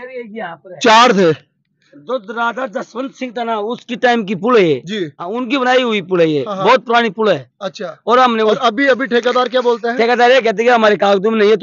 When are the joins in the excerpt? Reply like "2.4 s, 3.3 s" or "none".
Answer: none